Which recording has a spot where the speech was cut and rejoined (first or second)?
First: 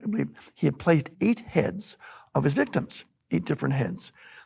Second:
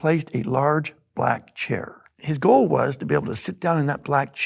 first